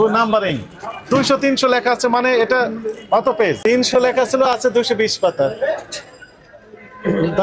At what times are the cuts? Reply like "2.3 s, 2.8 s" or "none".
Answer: 3.6 s